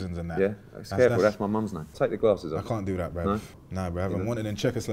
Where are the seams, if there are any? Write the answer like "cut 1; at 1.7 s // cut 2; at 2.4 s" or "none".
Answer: cut 1; at 1.8 s // cut 2; at 3.7 s

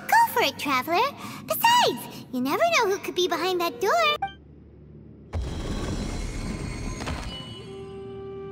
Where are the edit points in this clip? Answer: cut 1; at 4.1 s

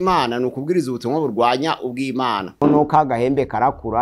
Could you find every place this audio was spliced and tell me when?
cut 1; at 2.6 s

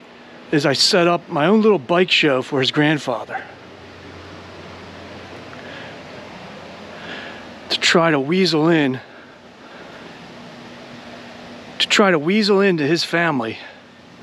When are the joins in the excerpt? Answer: none

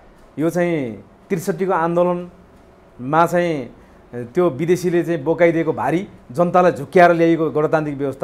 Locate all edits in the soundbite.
cut 1; at 6.2 s

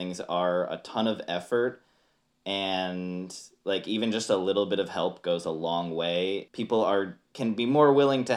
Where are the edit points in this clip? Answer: cut 1; at 6.5 s // cut 2; at 7.2 s

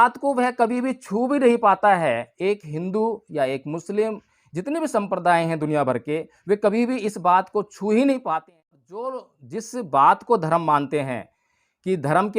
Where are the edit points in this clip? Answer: cut 1; at 8.4 s

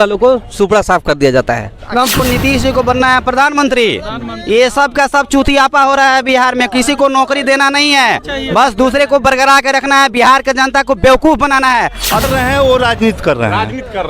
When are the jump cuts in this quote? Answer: cut 1; at 2.2 s // cut 2; at 12.2 s

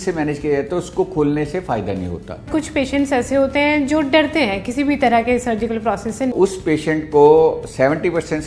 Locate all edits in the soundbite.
cut 1; at 2.5 s // cut 2; at 6.3 s

